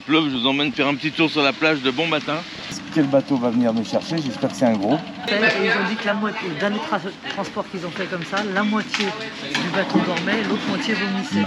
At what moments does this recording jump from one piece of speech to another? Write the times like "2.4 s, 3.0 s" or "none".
2.8 s, 5.3 s